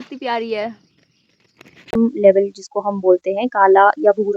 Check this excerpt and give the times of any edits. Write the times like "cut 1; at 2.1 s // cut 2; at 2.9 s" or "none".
cut 1; at 1.9 s